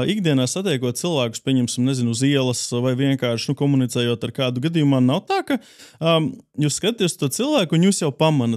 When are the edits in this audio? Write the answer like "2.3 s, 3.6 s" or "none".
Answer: none